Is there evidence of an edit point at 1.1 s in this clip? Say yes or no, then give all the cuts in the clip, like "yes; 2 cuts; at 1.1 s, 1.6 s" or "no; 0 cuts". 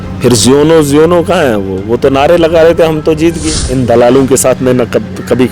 no; 1 cut; at 3.5 s